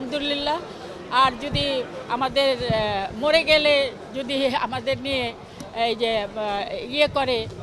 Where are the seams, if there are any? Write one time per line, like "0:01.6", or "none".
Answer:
none